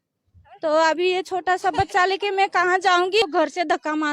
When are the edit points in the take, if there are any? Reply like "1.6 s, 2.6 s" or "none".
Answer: 3.2 s